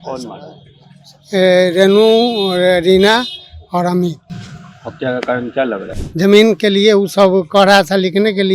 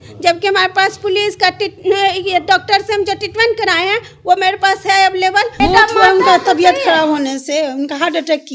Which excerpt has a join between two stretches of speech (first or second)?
second